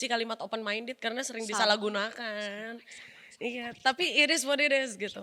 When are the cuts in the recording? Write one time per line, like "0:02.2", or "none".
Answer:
none